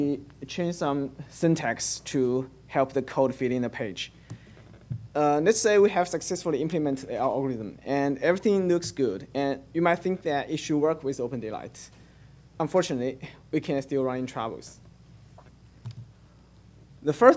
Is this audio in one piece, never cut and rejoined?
no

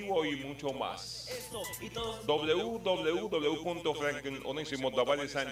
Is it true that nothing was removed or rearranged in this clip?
yes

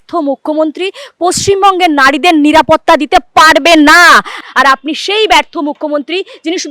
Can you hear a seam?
yes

